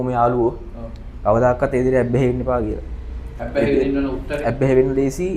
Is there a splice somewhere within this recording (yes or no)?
no